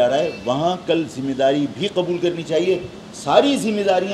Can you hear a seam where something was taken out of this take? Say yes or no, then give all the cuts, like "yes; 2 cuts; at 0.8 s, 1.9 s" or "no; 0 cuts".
no; 0 cuts